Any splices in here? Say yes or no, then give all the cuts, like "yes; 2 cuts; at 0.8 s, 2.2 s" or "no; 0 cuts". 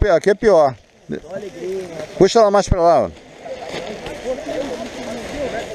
no; 0 cuts